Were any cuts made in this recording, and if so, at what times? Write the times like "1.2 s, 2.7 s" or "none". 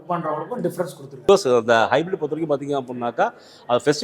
1.3 s